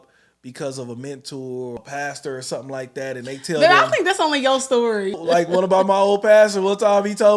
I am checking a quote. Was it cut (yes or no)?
yes